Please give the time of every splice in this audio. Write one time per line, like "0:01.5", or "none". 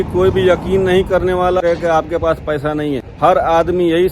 0:01.6
0:03.1